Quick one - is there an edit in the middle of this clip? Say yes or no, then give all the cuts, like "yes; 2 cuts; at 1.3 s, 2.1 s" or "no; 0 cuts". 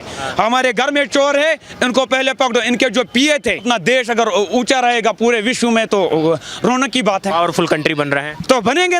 yes; 1 cut; at 3.6 s